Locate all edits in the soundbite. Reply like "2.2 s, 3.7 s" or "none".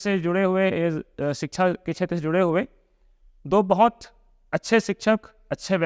none